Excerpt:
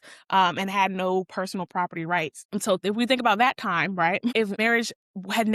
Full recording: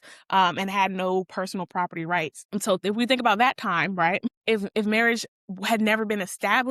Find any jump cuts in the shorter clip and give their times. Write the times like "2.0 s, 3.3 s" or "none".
4.5 s